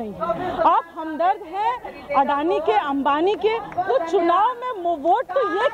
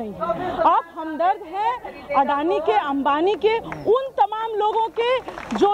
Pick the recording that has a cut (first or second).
first